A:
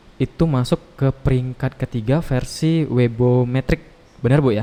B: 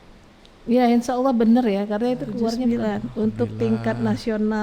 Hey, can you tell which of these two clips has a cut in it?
B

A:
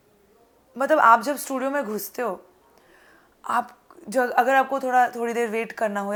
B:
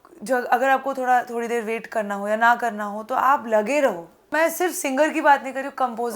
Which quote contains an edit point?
B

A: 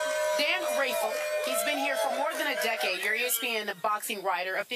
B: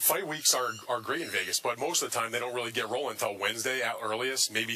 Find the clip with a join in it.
B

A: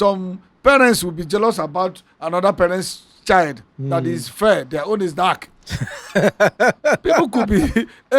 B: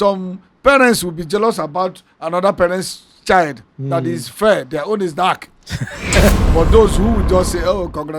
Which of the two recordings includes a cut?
B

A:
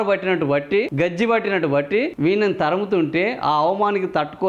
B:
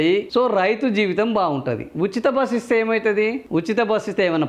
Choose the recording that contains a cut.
A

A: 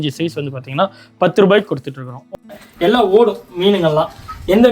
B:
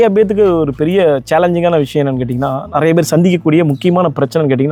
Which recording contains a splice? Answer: A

